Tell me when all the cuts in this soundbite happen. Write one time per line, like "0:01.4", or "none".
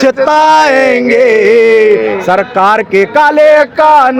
none